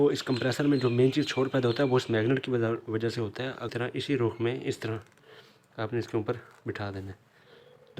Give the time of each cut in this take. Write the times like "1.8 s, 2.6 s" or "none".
3.7 s